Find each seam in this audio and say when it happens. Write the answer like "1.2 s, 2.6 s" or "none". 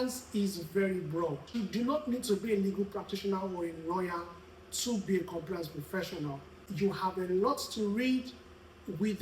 1.5 s, 6.6 s